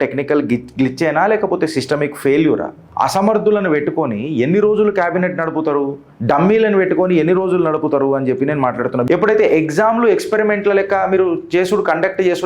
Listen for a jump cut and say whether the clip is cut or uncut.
cut